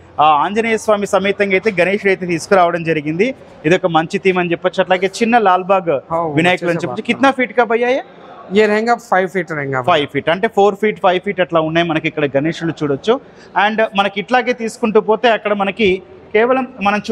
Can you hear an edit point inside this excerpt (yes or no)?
no